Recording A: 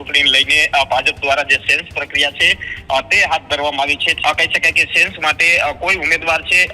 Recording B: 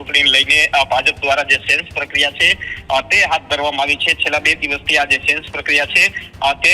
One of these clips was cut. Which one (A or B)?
A